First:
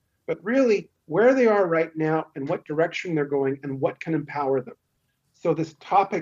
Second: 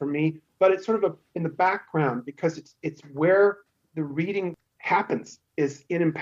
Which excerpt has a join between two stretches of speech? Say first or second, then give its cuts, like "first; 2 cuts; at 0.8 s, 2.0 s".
second; 1 cut; at 4.7 s